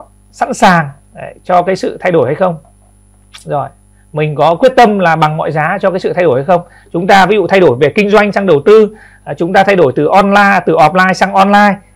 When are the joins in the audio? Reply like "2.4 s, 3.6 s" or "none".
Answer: none

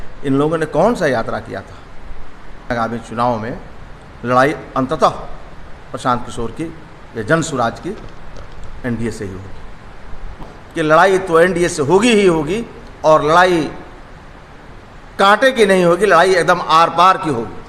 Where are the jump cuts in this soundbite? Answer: 2.7 s, 10.4 s

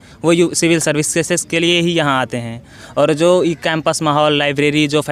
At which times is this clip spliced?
none

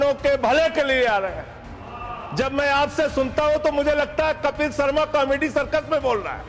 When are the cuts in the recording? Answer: none

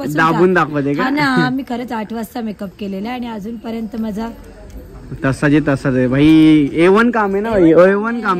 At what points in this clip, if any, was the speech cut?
none

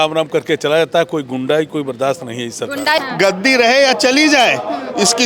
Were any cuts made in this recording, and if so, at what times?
3.0 s

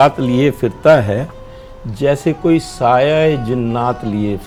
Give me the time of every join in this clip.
none

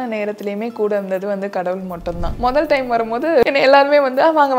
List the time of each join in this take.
2.3 s, 3.4 s

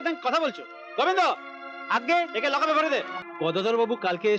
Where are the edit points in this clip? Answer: 3.2 s

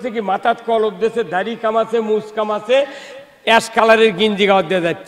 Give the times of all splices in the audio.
none

